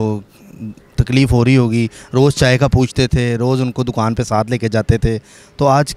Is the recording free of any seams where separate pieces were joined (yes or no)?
yes